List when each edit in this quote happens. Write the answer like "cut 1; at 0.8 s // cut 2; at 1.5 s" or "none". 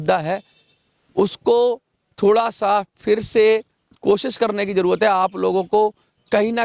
none